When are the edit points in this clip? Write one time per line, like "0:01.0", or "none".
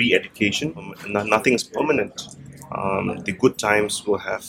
0:01.0